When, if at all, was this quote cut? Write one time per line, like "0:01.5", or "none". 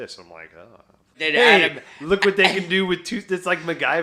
0:01.2